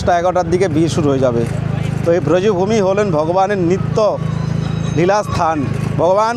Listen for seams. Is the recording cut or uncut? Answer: uncut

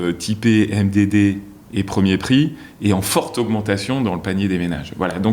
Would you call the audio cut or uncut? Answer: uncut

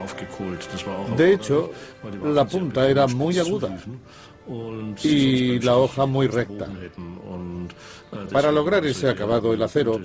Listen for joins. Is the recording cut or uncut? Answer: uncut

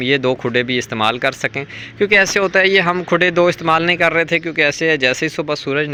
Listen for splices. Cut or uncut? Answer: uncut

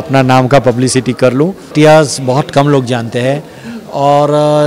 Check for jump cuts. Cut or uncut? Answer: cut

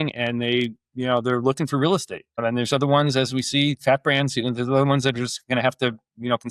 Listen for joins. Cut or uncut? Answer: cut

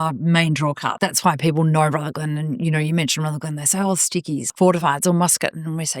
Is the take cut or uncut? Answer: cut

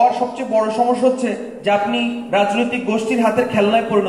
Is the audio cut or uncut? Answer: uncut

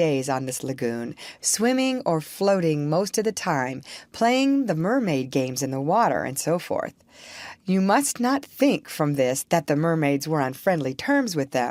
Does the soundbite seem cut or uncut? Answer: uncut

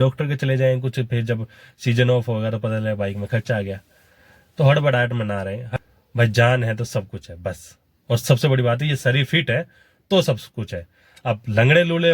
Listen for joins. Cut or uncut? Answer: cut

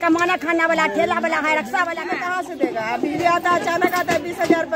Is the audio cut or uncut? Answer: cut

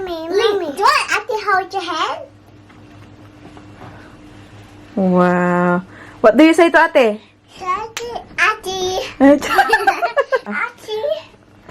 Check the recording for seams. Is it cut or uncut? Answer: cut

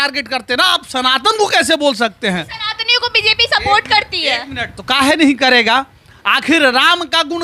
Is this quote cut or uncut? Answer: uncut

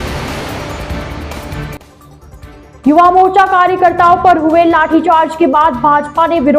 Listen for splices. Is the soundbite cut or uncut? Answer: cut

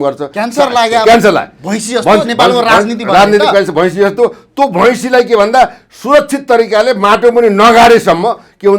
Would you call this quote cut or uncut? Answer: uncut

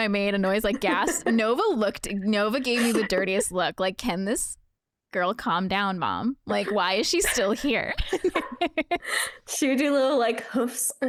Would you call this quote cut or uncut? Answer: uncut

